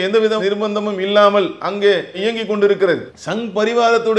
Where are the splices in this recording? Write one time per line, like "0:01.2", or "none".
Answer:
0:03.1

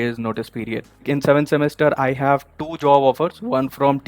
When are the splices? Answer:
0:00.9

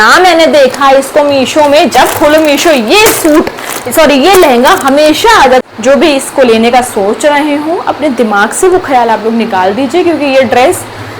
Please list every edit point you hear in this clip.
0:05.6

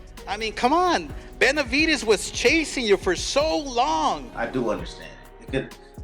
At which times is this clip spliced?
0:04.3

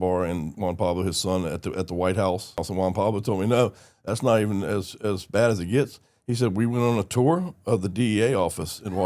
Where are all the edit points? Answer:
0:02.7

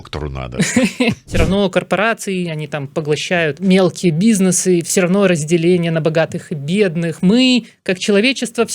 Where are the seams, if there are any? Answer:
0:01.3
0:03.6
0:04.9

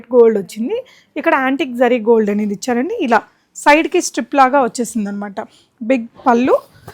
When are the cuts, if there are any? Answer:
none

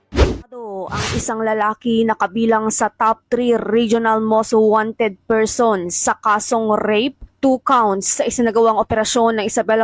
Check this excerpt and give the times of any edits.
0:00.9

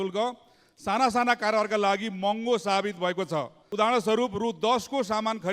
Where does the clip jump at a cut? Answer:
0:03.6

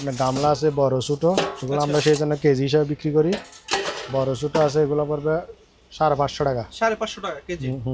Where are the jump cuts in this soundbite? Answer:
none

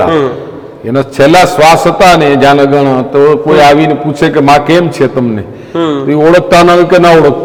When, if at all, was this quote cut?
none

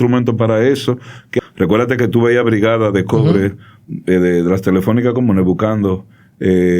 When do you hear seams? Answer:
0:01.2

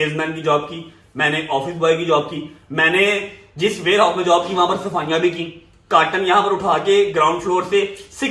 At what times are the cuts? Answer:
none

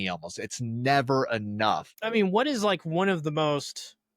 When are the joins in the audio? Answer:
0:01.9

